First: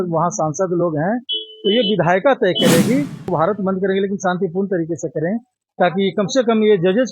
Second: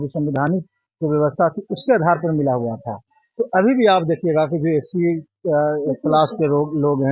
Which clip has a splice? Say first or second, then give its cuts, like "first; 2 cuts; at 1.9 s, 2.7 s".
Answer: first; 1 cut; at 3.3 s